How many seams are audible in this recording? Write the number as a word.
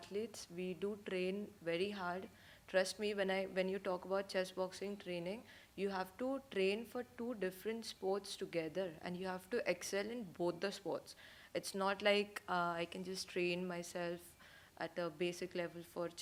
zero